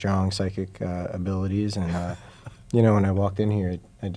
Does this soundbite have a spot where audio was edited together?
no; 0 cuts

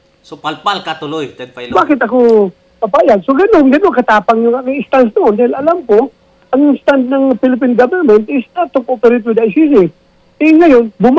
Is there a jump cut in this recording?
no; 0 cuts

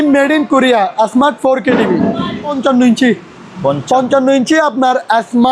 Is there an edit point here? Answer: yes; 1 cut; at 2.6 s

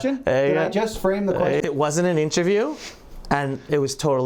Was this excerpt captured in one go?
no; 1 cut; at 1.6 s

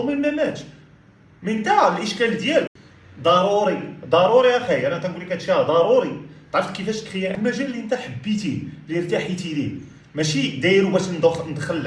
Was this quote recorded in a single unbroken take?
no; 2 cuts; at 2.7 s, 7.3 s

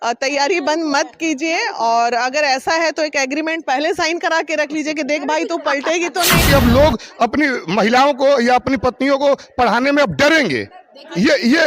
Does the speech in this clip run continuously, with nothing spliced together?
no; 1 cut; at 6.4 s

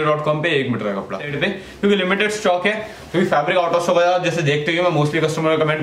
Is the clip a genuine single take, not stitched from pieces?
no; 1 cut; at 1.3 s

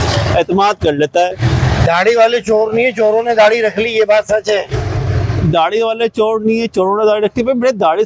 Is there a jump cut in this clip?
yes; 1 cut; at 1.4 s

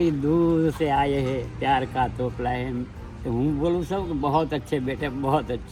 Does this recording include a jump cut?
no; 0 cuts

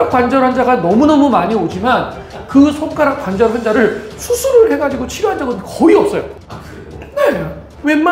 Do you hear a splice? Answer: no; 0 cuts

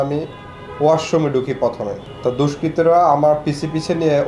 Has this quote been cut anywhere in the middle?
yes; 1 cut; at 2.0 s

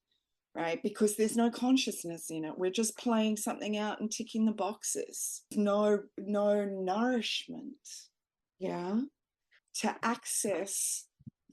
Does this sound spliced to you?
yes; 2 cuts; at 5.5 s, 9.5 s

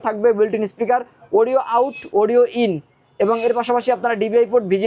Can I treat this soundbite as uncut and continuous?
yes; 0 cuts

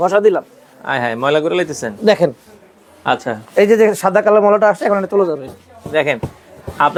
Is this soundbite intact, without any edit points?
yes; 0 cuts

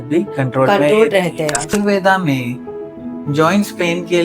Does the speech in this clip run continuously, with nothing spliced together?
no; 1 cut; at 1.7 s

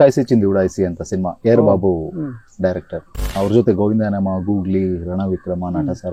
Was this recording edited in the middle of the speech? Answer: yes; 1 cut; at 3.3 s

